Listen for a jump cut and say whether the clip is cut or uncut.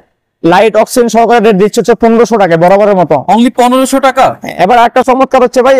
uncut